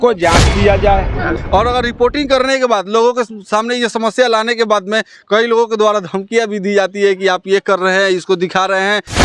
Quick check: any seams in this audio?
yes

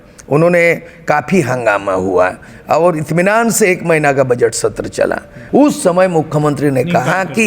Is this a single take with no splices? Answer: no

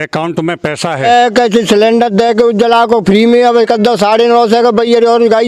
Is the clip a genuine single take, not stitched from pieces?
no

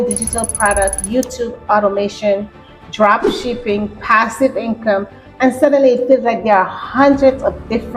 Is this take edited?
no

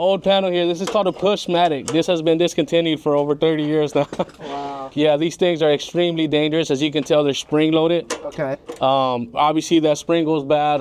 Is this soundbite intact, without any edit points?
yes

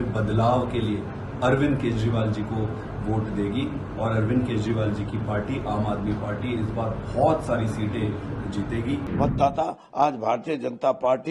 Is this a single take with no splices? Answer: no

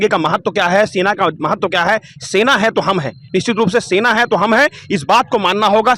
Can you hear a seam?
no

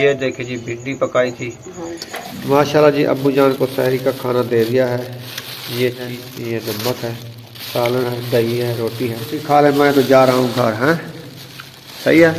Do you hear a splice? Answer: yes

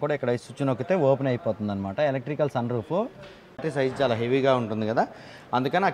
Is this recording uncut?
no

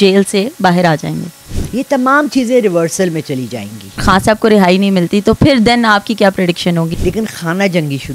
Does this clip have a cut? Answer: yes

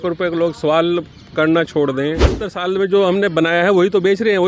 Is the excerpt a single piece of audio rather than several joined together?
no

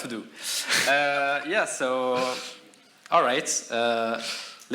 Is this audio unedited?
yes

